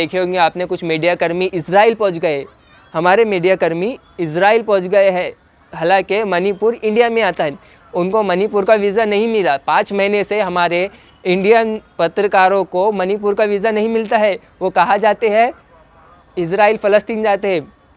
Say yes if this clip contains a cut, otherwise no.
no